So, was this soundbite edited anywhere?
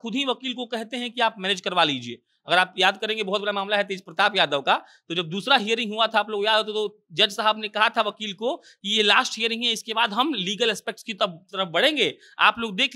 no; 0 cuts

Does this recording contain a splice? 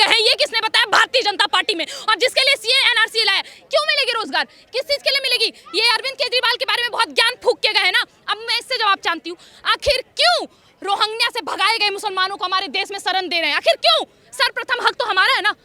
no; 0 cuts

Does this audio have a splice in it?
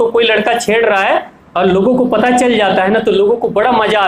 yes; 1 cut; at 1.4 s

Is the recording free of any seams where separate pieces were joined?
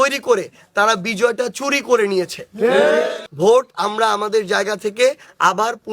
no; 1 cut; at 3.2 s

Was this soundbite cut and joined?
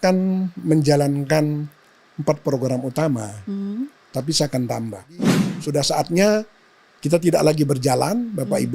yes; 1 cut; at 5.5 s

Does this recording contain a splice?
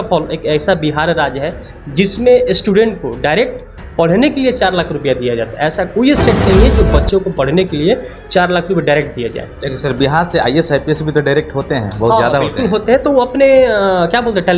no; 0 cuts

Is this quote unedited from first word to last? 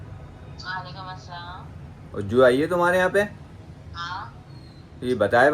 yes; 0 cuts

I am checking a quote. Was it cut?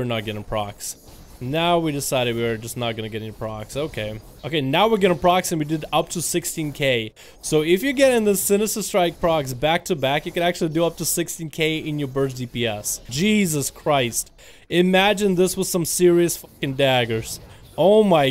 yes; 2 cuts; at 4.3 s, 13.0 s

